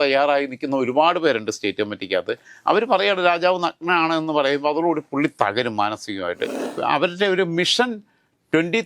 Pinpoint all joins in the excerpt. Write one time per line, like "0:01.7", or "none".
0:06.6